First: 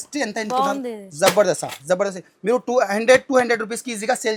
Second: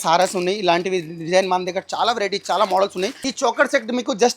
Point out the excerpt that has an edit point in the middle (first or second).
second